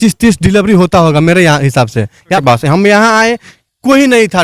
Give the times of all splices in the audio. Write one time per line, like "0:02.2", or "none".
0:02.4